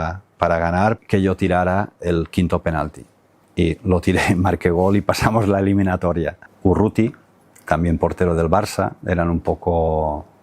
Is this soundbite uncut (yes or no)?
no